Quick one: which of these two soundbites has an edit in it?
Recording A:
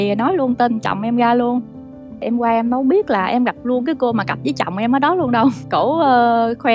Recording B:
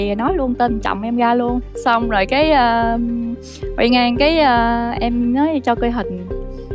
A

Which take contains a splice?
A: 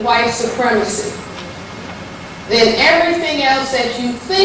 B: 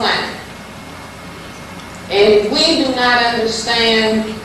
B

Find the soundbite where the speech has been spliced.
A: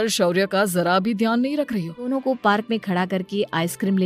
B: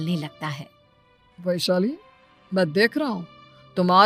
A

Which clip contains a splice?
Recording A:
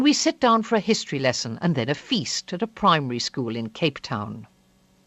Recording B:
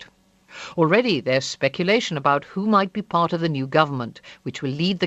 A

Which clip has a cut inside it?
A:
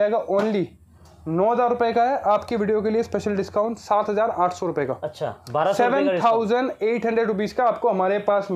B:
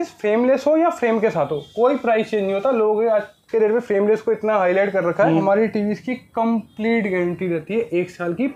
B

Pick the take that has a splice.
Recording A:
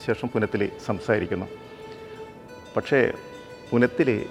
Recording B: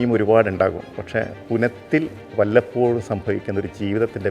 B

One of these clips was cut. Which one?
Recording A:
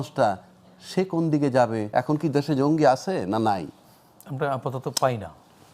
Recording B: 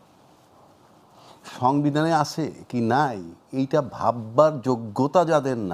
A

